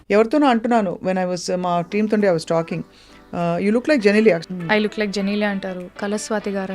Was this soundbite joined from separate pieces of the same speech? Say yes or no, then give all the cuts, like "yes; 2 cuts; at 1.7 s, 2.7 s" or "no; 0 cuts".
yes; 1 cut; at 4.4 s